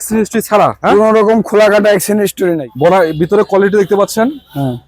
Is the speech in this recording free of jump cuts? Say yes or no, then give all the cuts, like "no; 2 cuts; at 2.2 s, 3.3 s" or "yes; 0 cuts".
no; 1 cut; at 2.7 s